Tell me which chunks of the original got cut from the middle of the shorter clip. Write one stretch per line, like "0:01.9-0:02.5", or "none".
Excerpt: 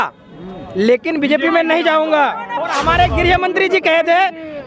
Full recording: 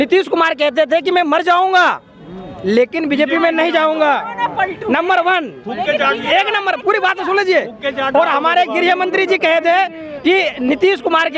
0:04.6-0:08.3